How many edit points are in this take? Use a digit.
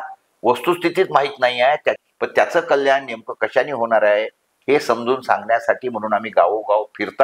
1